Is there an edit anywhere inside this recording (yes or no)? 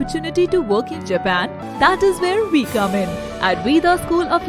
yes